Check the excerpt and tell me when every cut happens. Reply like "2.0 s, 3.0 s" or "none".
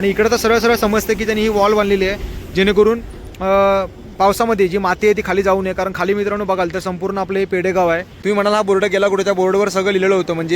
8.1 s